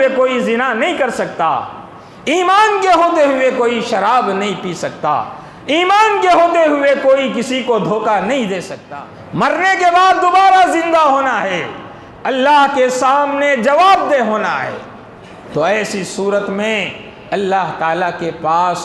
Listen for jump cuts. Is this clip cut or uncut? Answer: cut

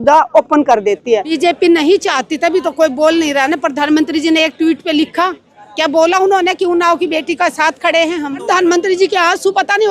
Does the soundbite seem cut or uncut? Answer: cut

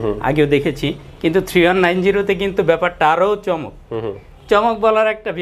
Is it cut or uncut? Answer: uncut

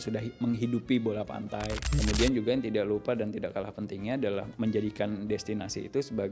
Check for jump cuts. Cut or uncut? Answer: cut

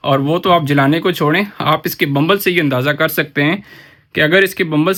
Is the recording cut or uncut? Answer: uncut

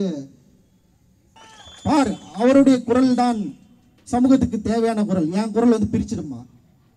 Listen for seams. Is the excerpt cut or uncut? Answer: cut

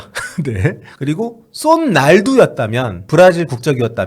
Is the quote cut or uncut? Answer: cut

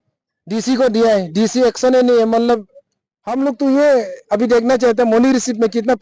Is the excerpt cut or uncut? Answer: uncut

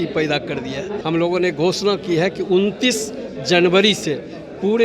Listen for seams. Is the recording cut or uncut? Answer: cut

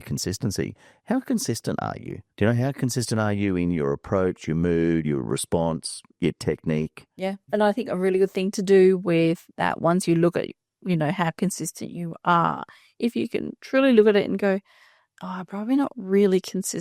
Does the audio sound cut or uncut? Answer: uncut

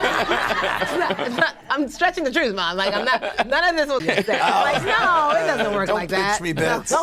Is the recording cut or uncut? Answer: cut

